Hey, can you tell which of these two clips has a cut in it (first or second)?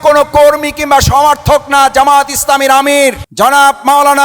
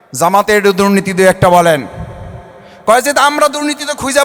first